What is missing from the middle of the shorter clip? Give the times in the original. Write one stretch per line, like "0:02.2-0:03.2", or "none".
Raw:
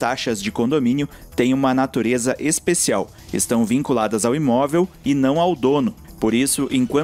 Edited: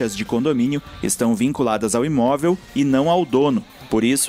0:01.2-0:03.2